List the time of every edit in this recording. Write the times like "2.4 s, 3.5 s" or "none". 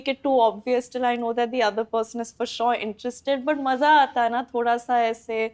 none